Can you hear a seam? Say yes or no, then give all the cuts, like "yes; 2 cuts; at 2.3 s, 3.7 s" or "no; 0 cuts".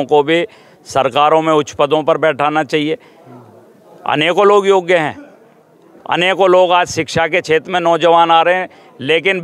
no; 0 cuts